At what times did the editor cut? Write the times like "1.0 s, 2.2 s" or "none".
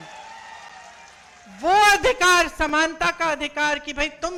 none